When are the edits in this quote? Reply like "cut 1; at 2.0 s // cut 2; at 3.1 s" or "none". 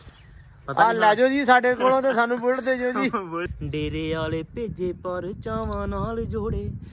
cut 1; at 3.5 s

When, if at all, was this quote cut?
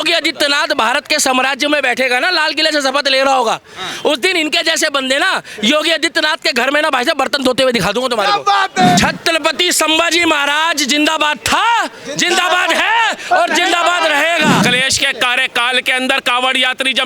cut 1; at 9.0 s // cut 2; at 14.6 s

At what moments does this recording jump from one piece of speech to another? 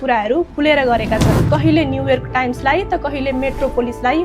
cut 1; at 1.4 s

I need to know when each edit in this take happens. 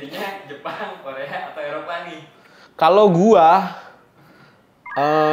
none

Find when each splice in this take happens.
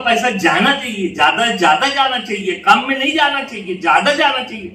none

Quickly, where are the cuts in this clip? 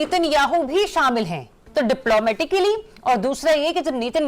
cut 1; at 1.6 s

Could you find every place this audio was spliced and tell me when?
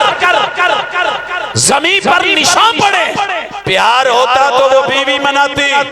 cut 1; at 3.4 s

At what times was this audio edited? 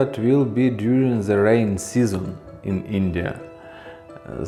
none

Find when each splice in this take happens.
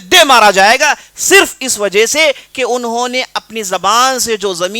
none

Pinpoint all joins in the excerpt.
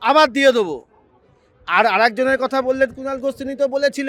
none

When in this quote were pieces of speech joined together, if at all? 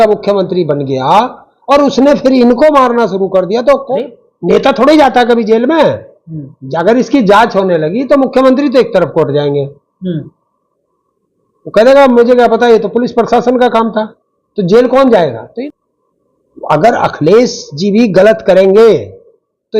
cut 1; at 3.9 s // cut 2; at 15.5 s

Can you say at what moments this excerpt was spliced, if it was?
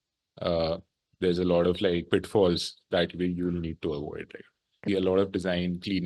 cut 1; at 4.9 s

